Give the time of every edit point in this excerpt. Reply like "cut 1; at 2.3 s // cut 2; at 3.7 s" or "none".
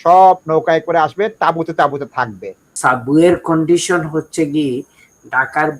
cut 1; at 2.6 s